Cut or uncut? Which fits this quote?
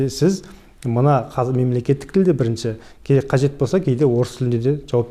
uncut